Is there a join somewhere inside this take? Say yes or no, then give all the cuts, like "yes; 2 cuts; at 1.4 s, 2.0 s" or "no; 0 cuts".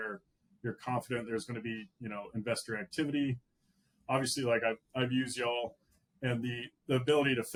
no; 0 cuts